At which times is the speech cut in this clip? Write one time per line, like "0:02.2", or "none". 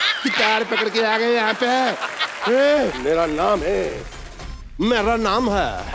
0:03.0